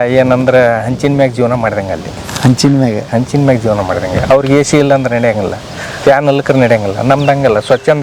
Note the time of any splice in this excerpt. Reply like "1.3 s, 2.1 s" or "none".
none